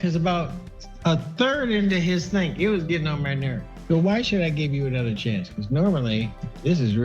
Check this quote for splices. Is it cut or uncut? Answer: cut